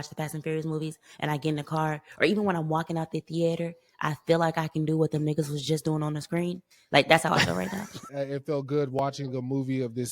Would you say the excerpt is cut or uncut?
cut